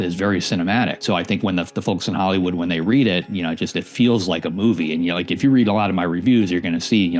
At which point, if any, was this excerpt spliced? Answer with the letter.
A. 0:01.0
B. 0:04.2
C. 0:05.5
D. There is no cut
A